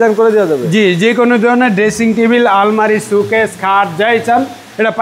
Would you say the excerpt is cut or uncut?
uncut